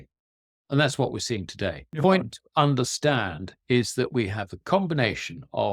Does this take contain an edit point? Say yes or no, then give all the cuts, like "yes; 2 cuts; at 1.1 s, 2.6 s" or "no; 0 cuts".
yes; 1 cut; at 1.9 s